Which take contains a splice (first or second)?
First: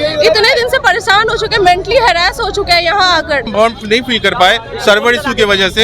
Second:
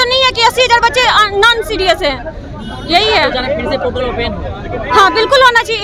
first